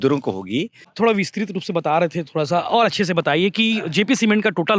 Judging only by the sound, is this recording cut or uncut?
cut